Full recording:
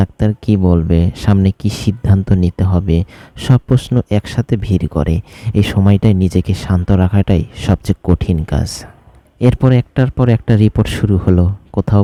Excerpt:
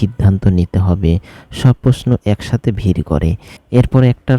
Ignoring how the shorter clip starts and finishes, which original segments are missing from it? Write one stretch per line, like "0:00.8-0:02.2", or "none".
0:05.3-0:09.2